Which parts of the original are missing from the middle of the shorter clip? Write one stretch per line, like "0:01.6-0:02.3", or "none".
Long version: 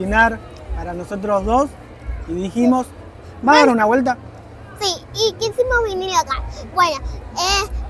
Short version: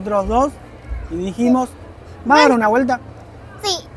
none